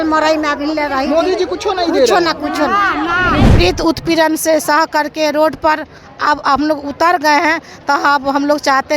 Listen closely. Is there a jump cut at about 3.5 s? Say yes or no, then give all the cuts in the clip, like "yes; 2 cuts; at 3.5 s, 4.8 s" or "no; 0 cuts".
yes; 1 cut; at 3.5 s